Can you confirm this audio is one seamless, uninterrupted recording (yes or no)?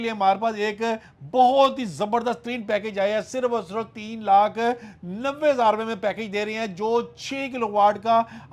yes